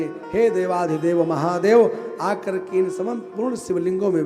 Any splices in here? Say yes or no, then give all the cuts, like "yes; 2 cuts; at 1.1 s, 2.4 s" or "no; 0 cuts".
no; 0 cuts